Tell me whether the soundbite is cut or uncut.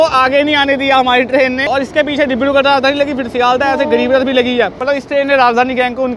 cut